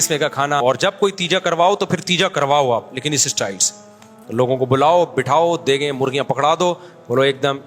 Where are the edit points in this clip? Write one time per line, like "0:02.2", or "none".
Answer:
0:00.9